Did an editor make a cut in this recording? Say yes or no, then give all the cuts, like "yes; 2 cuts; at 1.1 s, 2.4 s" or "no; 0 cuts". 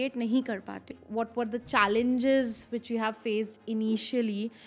yes; 1 cut; at 0.9 s